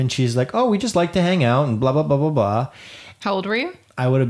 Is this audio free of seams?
yes; 0 cuts

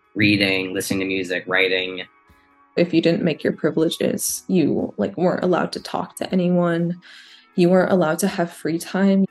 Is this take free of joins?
no; 1 cut; at 2.3 s

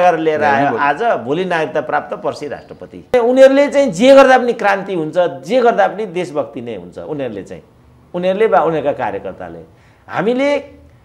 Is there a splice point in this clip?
yes; 1 cut; at 3.1 s

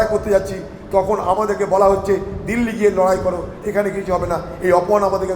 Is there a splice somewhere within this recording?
yes; 1 cut; at 3.5 s

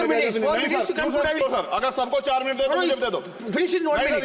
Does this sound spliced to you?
yes; 1 cut; at 1.4 s

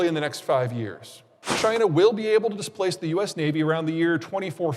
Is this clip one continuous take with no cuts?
no; 1 cut; at 1.0 s

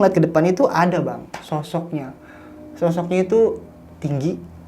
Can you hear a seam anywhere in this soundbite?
no; 0 cuts

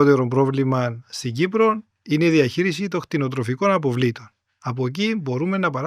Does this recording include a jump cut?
no; 0 cuts

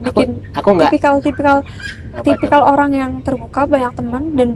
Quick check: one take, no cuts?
yes; 0 cuts

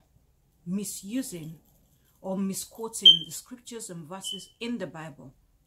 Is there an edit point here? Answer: no; 0 cuts

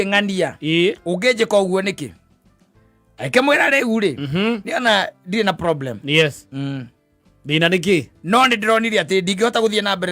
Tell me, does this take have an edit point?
no; 0 cuts

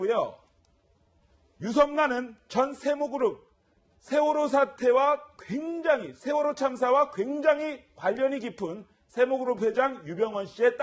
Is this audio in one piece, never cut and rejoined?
no; 1 cut; at 2.8 s

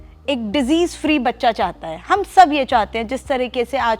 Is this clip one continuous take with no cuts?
yes; 0 cuts

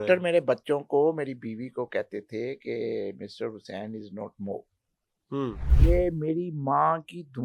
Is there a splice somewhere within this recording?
yes; 1 cut; at 5.7 s

